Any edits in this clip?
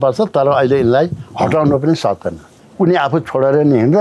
yes; 1 cut; at 2.6 s

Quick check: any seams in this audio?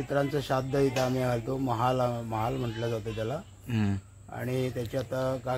no; 0 cuts

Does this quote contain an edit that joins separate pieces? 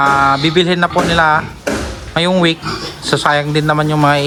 no; 0 cuts

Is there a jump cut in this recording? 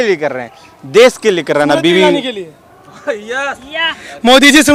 no; 0 cuts

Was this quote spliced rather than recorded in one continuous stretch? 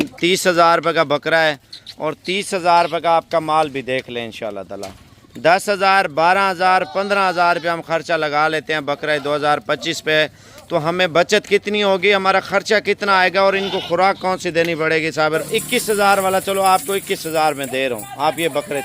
yes; 1 cut; at 15.4 s

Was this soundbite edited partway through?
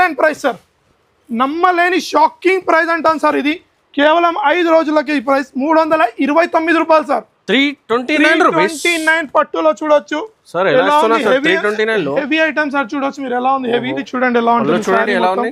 yes; 1 cut; at 14.0 s

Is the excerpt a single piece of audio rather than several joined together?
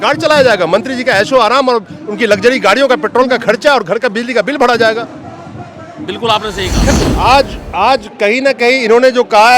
no; 1 cut; at 6.8 s

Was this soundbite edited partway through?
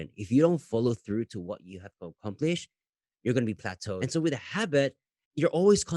yes; 1 cut; at 4.0 s

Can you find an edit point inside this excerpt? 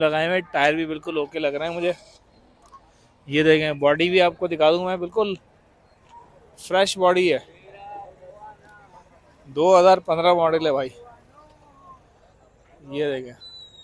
no; 0 cuts

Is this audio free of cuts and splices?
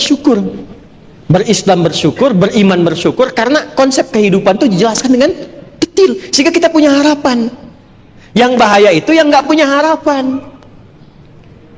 yes; 0 cuts

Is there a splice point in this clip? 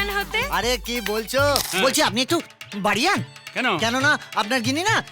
yes; 1 cut; at 1.7 s

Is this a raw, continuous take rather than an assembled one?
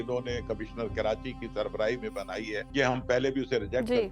no; 1 cut; at 2.6 s

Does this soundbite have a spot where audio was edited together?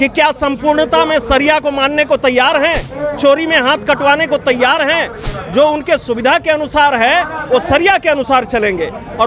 no; 0 cuts

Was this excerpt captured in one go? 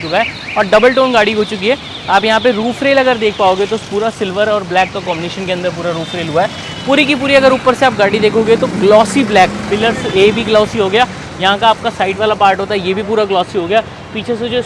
yes; 0 cuts

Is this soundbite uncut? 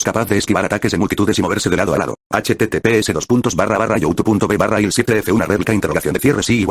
no; 2 cuts; at 2.2 s, 4.7 s

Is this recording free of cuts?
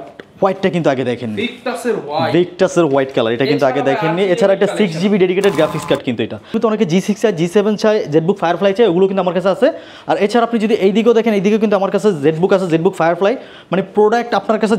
no; 1 cut; at 6.6 s

